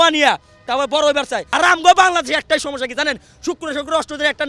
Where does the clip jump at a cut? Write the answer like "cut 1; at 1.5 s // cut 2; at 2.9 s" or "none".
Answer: cut 1; at 1.5 s

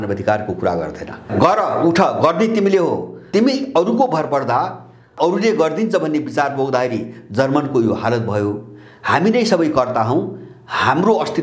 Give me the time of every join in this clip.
cut 1; at 1.3 s // cut 2; at 3.3 s // cut 3; at 5.1 s

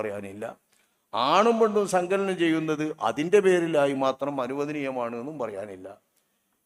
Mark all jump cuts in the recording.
none

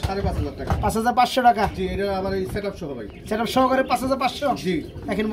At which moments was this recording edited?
none

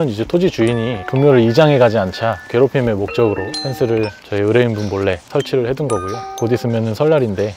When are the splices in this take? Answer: none

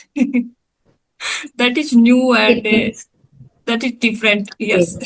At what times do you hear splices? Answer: none

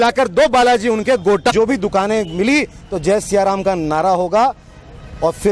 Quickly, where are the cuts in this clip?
cut 1; at 1.5 s

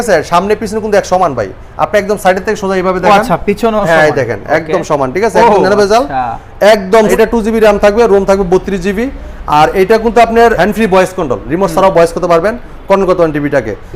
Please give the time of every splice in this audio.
cut 1; at 7.1 s // cut 2; at 10.6 s

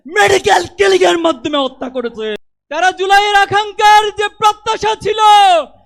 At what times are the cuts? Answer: cut 1; at 2.5 s

